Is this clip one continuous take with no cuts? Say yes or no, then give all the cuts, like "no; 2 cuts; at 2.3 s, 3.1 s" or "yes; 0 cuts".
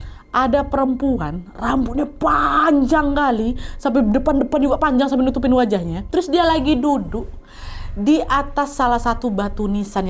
yes; 0 cuts